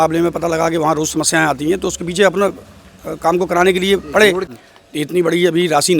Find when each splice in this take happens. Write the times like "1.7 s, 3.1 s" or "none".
4.5 s